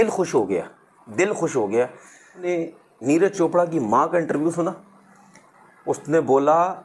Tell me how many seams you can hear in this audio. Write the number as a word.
one